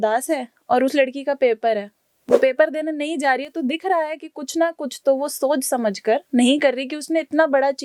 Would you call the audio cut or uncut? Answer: uncut